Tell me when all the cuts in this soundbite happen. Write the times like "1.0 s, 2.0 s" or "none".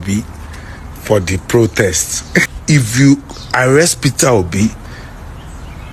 2.5 s